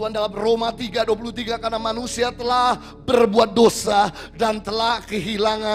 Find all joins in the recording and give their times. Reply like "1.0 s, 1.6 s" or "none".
none